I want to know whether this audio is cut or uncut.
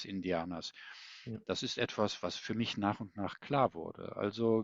uncut